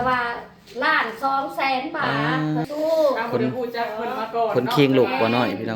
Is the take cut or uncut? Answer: cut